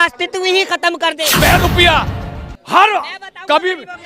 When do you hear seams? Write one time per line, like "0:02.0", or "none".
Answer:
0:01.2